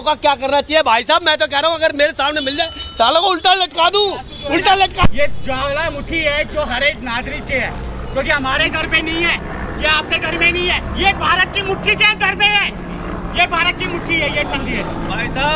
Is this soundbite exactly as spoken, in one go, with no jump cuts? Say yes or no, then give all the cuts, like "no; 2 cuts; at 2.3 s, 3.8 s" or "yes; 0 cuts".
no; 1 cut; at 5.1 s